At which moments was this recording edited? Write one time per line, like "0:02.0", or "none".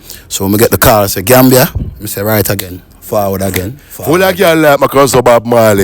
0:03.9